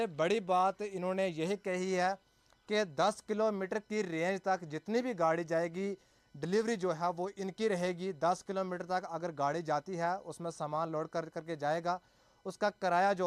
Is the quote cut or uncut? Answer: uncut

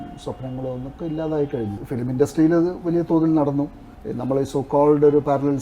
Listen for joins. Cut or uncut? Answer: uncut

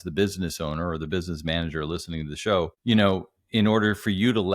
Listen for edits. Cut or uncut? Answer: cut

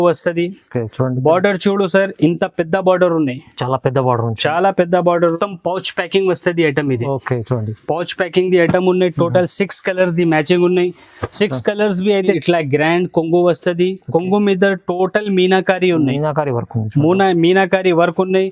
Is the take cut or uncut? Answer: cut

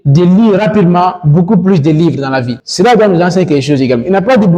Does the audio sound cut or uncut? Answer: uncut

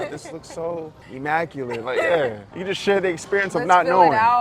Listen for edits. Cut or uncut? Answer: cut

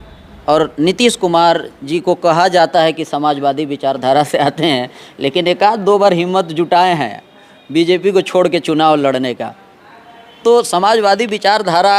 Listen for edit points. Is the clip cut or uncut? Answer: uncut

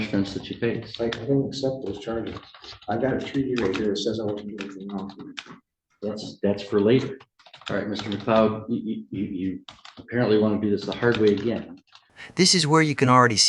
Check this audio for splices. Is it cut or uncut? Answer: uncut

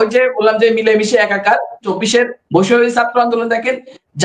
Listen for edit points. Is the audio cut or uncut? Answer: cut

